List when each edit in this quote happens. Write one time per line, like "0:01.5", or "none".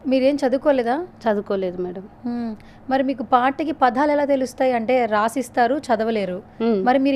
none